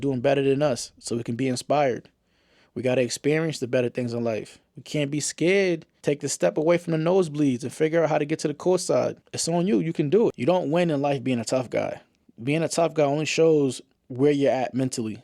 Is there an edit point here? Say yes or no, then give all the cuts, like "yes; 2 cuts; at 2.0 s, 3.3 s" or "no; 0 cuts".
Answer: yes; 2 cuts; at 6.0 s, 10.3 s